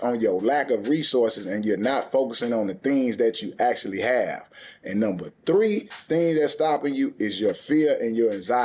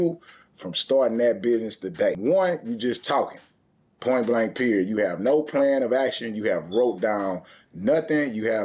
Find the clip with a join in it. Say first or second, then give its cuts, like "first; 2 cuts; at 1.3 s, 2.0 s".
second; 1 cut; at 2.2 s